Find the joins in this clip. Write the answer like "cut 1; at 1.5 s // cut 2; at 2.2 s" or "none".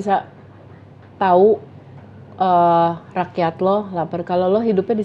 none